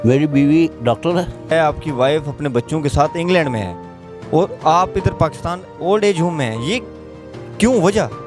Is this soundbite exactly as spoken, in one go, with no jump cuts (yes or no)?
no